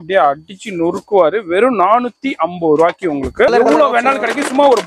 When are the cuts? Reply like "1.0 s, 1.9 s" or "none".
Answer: 3.5 s